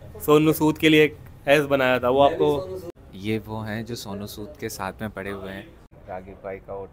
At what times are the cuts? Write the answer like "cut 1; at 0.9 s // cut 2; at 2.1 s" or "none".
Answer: cut 1; at 2.9 s // cut 2; at 5.9 s

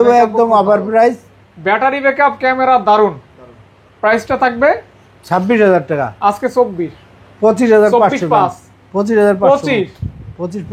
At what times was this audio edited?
none

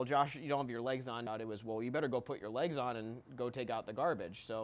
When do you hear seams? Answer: cut 1; at 1.2 s

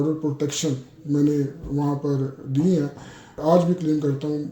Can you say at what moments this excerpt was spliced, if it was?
cut 1; at 3.4 s

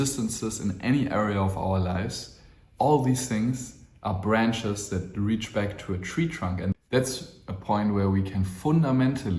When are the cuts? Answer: cut 1; at 6.7 s

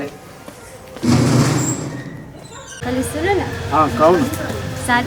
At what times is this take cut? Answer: cut 1; at 2.8 s

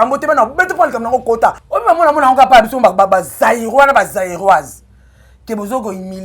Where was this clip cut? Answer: cut 1; at 1.6 s

